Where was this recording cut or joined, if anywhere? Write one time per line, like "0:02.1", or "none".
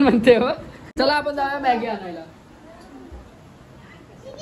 0:00.9

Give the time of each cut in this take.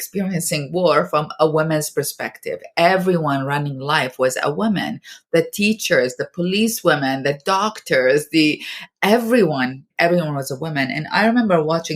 0:09.9

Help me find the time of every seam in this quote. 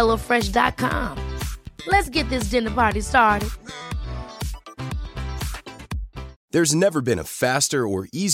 0:06.3

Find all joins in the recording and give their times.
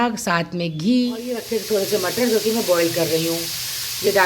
0:01.4

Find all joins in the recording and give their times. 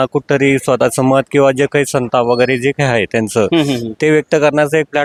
none

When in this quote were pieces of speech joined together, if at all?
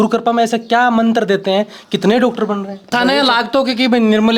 0:02.9

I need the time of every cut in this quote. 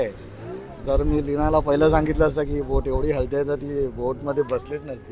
none

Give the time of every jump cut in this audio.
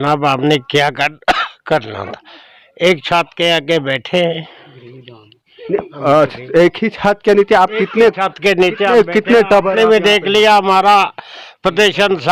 none

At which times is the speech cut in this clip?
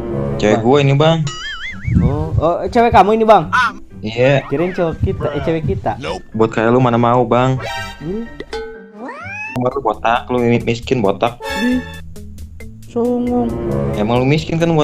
0:09.6

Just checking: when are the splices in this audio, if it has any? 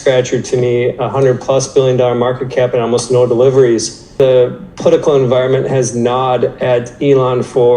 0:04.0

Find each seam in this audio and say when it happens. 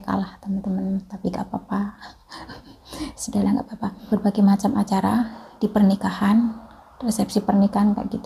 0:04.0

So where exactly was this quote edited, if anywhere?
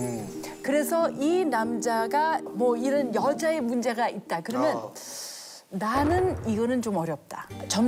none

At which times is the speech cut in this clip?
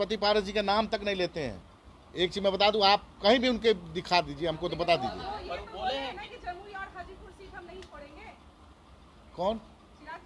none

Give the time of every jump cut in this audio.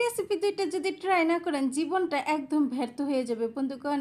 none

